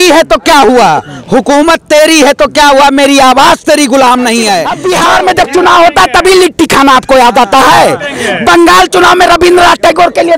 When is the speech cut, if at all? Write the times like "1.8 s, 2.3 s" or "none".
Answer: 4.7 s

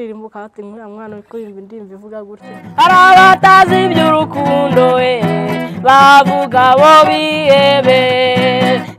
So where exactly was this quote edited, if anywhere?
2.6 s

